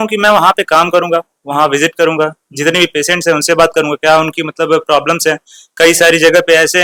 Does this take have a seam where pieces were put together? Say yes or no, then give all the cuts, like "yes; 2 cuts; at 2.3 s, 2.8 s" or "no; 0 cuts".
no; 0 cuts